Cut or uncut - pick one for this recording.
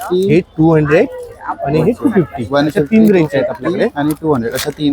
uncut